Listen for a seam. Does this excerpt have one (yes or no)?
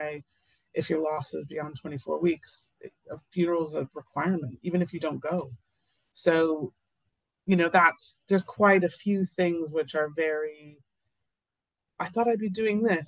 no